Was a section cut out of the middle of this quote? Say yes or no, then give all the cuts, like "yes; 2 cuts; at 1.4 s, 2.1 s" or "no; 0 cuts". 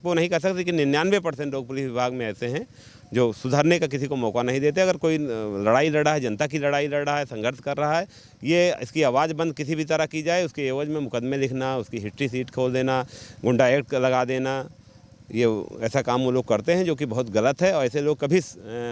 no; 0 cuts